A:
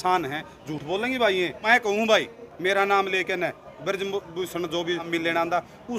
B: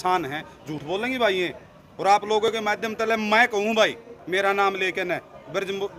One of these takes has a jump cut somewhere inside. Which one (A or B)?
A